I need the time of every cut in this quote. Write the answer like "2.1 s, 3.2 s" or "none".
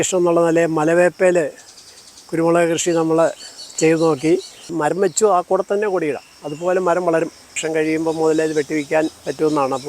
4.6 s, 7.6 s